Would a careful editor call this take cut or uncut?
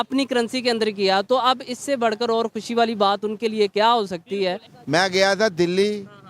cut